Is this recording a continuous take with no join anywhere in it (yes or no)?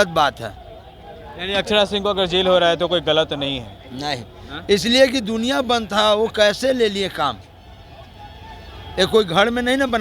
yes